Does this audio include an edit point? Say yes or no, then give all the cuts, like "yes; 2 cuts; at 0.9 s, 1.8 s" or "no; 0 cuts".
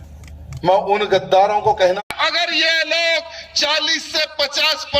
yes; 1 cut; at 2.0 s